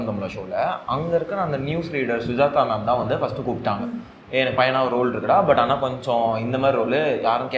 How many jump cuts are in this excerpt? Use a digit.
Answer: 0